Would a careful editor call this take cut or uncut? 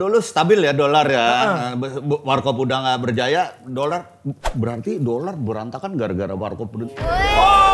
uncut